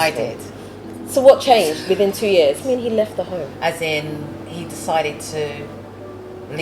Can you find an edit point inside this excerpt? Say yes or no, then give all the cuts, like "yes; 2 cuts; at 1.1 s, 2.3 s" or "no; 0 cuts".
yes; 1 cut; at 2.6 s